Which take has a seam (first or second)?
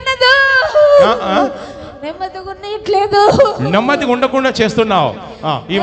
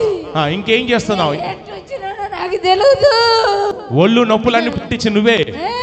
second